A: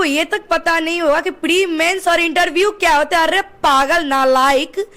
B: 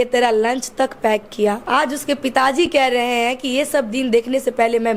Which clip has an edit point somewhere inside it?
B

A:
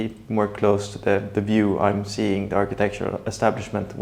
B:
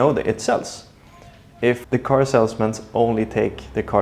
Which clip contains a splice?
B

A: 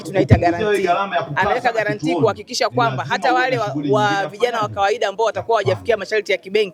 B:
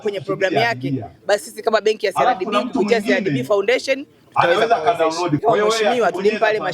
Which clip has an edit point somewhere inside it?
B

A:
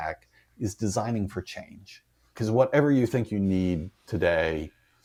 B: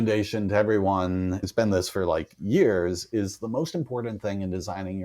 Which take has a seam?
B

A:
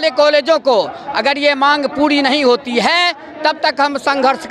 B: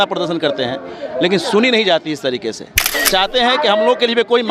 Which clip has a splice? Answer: B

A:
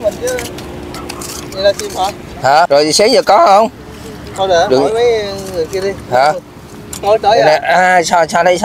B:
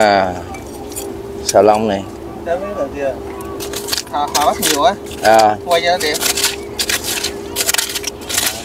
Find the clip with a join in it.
A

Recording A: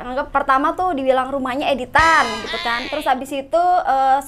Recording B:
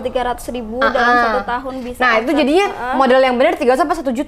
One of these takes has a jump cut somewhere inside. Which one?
A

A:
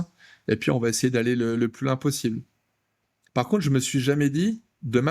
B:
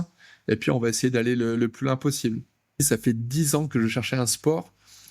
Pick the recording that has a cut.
B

